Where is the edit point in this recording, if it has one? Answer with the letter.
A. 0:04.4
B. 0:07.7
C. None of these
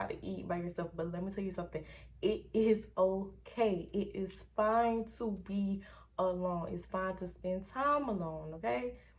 C